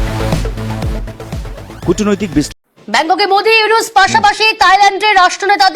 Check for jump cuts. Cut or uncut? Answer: cut